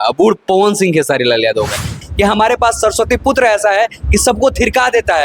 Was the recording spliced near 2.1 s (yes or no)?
yes